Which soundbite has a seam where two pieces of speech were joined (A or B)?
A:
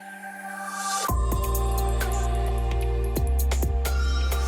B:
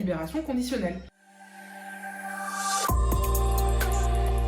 B